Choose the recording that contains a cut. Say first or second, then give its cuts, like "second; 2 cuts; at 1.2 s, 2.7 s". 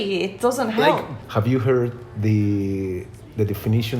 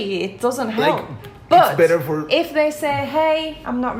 first; 1 cut; at 1.2 s